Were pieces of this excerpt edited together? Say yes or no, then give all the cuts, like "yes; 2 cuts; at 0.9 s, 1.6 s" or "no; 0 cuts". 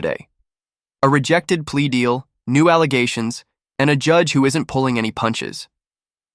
no; 0 cuts